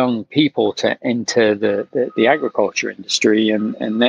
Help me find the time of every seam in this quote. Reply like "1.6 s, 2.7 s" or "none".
none